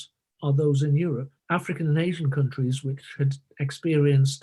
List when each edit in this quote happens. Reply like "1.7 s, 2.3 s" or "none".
1.3 s